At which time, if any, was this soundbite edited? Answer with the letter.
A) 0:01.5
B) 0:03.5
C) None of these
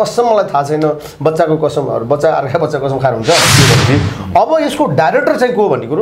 B